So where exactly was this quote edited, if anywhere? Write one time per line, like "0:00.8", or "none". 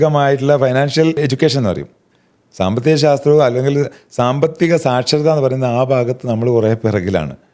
0:01.2